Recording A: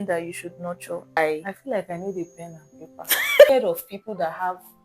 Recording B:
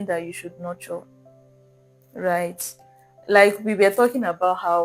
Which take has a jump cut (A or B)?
A